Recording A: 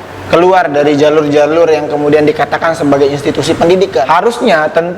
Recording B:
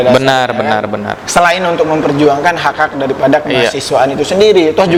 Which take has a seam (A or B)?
A